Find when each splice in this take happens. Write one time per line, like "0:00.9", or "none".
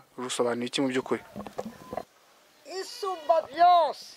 0:02.1